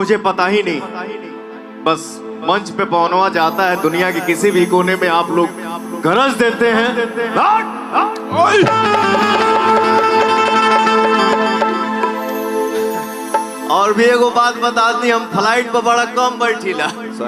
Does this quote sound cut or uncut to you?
uncut